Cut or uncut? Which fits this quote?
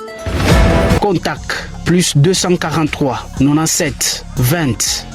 cut